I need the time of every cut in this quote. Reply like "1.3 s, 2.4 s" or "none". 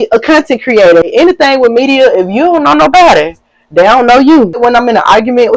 1.1 s, 4.6 s